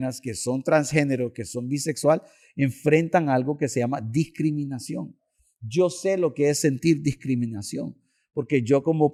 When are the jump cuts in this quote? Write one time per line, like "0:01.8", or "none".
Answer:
none